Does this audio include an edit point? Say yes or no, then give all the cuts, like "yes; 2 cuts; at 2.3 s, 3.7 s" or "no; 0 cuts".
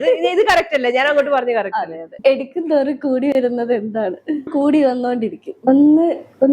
yes; 3 cuts; at 2.0 s, 4.5 s, 5.5 s